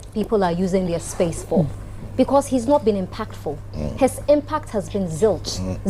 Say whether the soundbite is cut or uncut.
cut